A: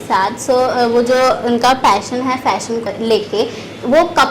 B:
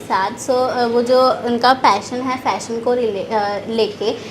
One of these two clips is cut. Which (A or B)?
A